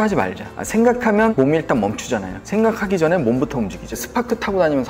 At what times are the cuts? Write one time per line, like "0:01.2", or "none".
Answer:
0:01.3
0:04.0

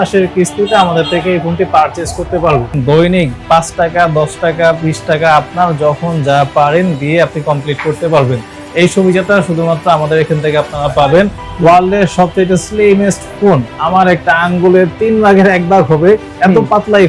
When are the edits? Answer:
0:02.8
0:11.5

